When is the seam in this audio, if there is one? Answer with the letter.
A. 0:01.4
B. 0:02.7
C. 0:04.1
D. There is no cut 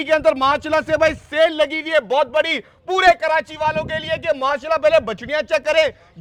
D